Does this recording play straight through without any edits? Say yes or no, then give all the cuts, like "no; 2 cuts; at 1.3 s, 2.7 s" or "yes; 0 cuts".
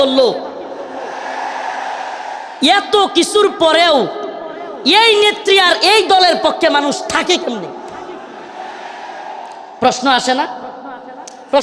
yes; 0 cuts